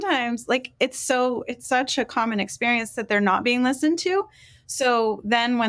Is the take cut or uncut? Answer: cut